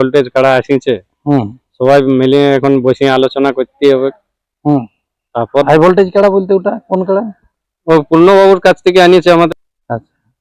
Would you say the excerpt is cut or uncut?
cut